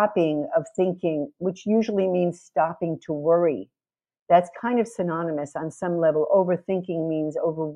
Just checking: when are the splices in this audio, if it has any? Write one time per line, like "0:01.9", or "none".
none